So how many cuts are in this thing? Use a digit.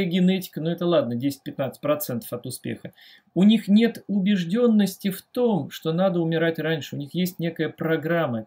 0